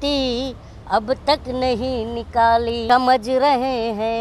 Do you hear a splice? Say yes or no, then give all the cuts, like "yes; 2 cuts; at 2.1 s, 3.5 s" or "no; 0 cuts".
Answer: yes; 1 cut; at 2.8 s